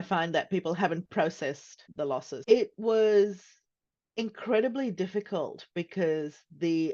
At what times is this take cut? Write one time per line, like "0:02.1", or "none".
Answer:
0:02.3